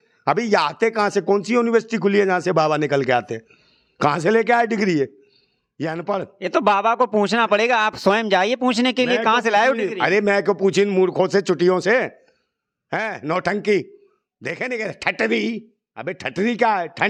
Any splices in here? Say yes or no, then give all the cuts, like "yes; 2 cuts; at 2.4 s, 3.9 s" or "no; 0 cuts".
no; 0 cuts